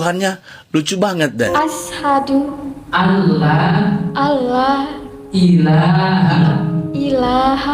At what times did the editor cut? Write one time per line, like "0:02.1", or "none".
0:01.5